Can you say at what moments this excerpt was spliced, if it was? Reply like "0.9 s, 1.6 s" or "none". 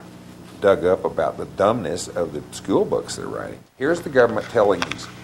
3.6 s